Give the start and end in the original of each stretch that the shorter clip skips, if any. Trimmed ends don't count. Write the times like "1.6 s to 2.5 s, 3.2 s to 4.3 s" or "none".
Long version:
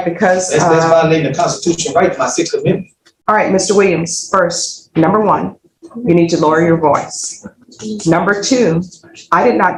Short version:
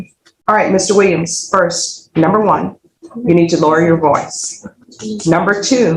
none